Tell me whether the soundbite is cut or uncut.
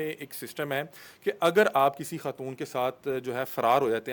uncut